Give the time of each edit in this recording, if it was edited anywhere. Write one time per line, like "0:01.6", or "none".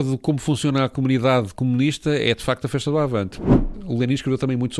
0:00.9
0:03.5

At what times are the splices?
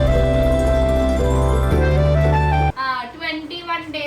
0:02.8

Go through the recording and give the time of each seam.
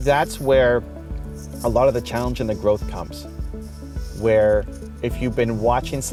none

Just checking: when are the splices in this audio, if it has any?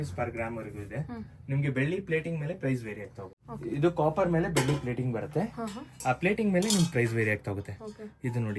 0:03.4

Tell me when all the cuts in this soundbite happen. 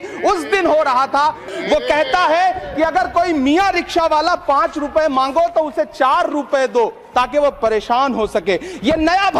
0:01.5

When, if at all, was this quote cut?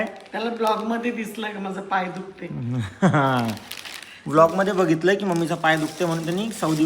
none

